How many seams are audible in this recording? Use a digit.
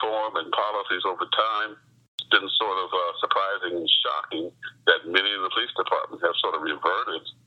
1